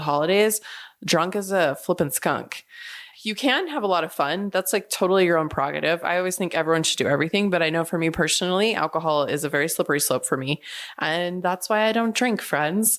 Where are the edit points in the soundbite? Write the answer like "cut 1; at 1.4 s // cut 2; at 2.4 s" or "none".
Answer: none